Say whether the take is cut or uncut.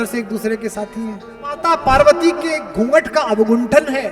cut